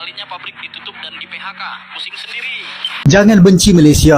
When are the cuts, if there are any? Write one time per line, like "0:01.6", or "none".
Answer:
0:03.0